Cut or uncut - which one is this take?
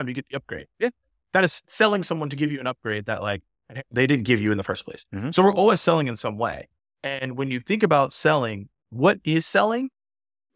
uncut